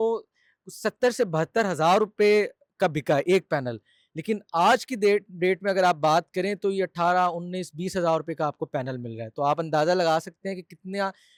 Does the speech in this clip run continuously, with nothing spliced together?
yes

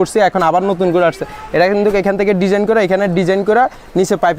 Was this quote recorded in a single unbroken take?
yes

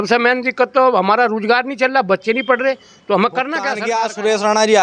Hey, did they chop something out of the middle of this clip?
yes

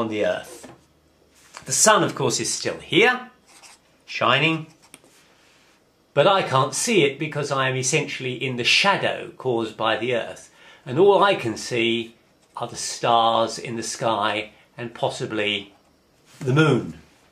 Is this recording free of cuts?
yes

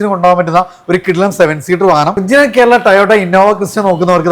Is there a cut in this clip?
yes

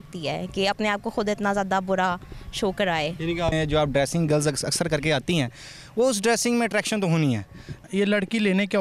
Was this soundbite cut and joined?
yes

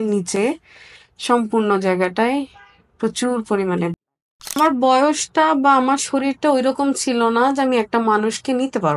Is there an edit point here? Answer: yes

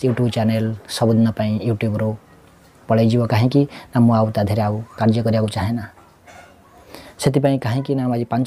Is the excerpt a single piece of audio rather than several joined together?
yes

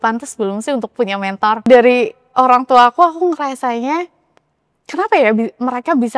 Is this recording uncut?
no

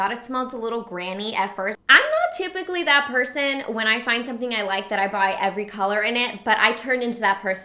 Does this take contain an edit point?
yes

